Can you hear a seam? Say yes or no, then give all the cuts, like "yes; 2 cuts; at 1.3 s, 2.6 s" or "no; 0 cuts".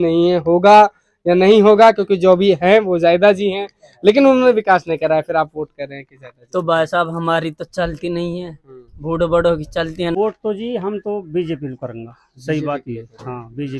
yes; 1 cut; at 10.1 s